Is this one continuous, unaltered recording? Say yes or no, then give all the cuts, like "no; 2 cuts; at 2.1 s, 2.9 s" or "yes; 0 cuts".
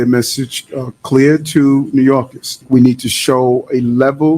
no; 1 cut; at 2.6 s